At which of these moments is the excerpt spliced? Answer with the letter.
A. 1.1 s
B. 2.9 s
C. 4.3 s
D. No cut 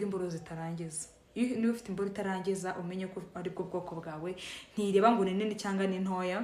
D